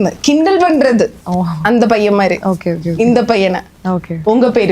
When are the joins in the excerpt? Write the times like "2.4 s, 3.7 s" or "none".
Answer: none